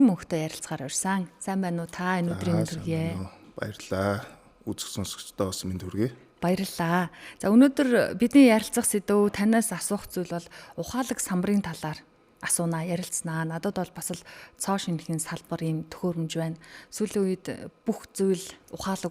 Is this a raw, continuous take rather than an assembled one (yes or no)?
yes